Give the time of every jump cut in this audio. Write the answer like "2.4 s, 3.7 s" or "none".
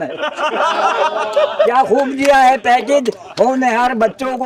none